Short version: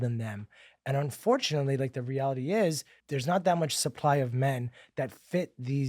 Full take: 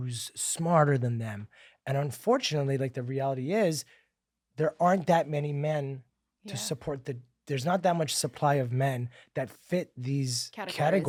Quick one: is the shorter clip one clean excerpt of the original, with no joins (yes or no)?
no